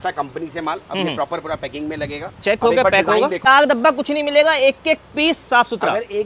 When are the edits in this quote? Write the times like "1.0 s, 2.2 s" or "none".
3.4 s

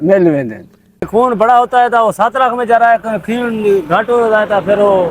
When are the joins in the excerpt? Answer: 1.1 s

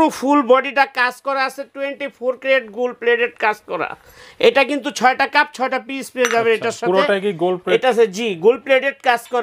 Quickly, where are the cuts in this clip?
none

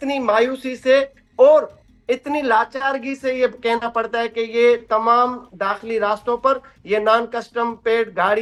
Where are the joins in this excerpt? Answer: none

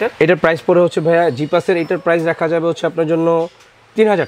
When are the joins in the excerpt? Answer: none

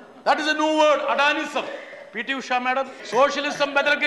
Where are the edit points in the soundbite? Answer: 3.0 s

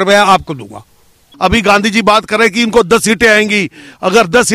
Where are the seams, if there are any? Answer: 1.2 s

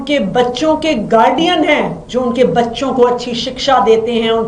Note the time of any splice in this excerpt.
none

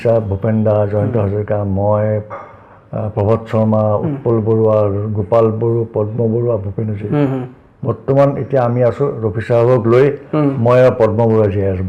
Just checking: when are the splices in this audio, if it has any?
none

